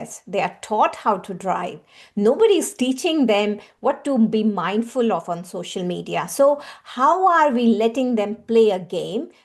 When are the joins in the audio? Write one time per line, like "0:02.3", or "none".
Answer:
none